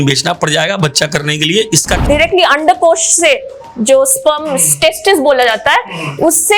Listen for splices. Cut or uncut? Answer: cut